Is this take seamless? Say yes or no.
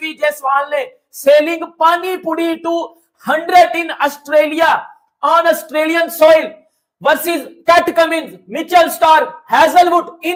yes